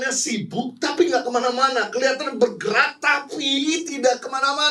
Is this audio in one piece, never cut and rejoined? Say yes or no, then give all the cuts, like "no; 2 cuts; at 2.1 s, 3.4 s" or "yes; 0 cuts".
yes; 0 cuts